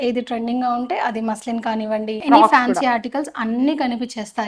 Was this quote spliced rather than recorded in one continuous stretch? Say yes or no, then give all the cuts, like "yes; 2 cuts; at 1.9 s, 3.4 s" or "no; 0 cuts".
yes; 1 cut; at 2.2 s